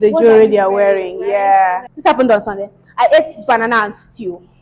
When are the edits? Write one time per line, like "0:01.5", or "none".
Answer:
0:01.9